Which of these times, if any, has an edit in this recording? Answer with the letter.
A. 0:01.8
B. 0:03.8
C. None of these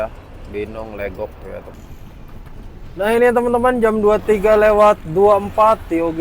A